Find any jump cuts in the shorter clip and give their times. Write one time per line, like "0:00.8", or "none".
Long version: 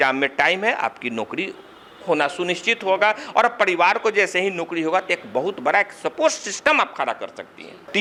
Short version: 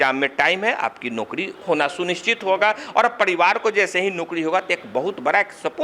0:01.5